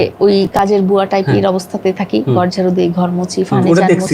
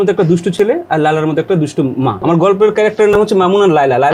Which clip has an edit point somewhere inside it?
second; 1 cut; at 2.2 s

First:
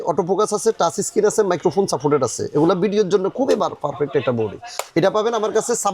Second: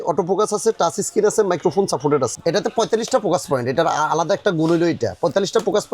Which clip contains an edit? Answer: second; 1 cut; at 2.3 s

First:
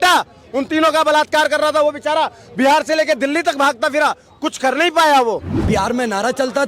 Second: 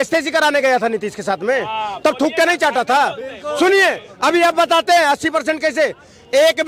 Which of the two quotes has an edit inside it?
first; 1 cut; at 5.5 s

